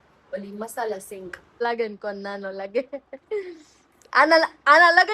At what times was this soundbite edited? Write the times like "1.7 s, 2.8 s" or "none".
1.6 s